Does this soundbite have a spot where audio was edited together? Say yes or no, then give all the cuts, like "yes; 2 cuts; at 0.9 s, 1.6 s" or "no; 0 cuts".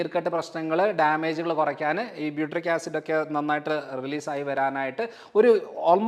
no; 0 cuts